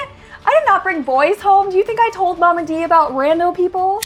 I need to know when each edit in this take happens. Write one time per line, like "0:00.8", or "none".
none